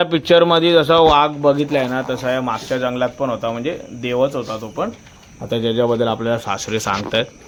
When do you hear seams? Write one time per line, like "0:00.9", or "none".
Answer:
none

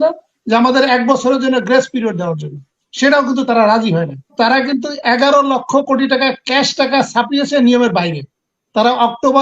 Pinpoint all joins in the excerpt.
0:04.3

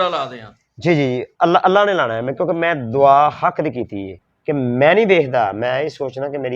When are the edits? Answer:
0:04.3

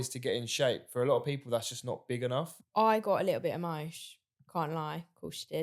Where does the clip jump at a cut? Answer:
0:02.6

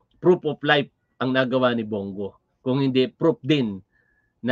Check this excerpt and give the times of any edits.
none

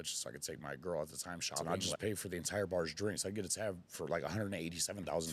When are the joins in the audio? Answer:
0:01.6

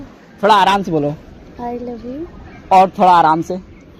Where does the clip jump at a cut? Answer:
none

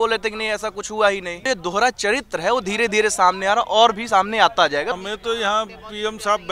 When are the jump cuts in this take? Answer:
0:01.4
0:05.0

